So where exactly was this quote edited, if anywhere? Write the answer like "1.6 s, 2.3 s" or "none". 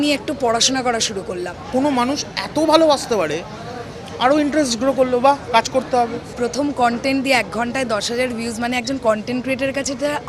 1.6 s, 6.3 s